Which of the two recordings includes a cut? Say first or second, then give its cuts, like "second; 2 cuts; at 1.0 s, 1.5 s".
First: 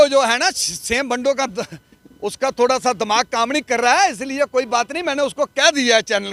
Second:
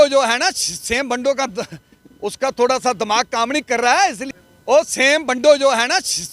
second; 1 cut; at 4.2 s